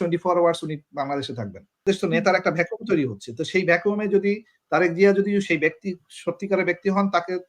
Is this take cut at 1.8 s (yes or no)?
yes